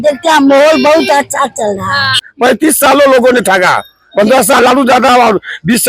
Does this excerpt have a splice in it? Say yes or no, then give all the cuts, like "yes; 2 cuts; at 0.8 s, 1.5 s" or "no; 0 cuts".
yes; 1 cut; at 2.3 s